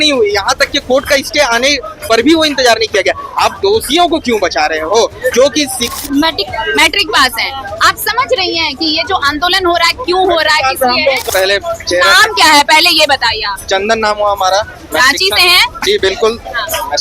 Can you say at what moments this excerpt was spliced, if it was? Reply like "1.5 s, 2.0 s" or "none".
5.9 s, 11.3 s